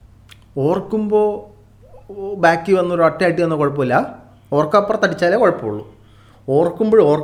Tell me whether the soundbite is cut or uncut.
uncut